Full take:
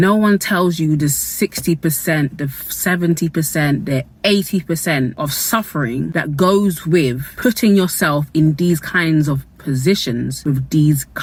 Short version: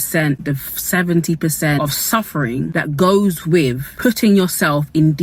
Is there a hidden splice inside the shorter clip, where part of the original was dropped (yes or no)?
yes